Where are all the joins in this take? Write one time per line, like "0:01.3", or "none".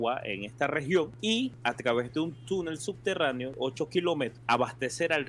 0:01.4
0:03.5
0:04.4